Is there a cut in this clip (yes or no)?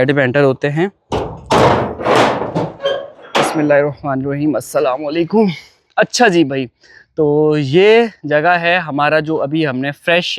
no